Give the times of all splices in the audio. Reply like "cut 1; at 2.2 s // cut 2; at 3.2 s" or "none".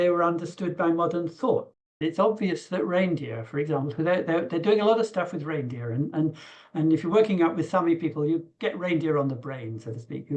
cut 1; at 2.0 s